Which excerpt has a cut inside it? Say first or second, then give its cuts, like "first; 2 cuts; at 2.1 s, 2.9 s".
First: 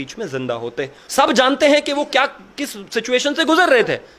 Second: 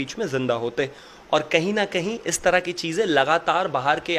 first; 1 cut; at 1.0 s